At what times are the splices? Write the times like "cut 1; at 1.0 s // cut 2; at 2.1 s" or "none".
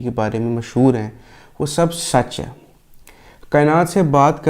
none